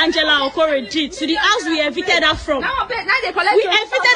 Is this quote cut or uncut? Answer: uncut